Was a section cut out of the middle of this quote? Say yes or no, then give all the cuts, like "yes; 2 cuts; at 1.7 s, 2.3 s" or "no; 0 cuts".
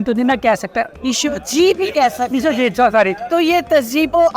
yes; 2 cuts; at 0.9 s, 3.2 s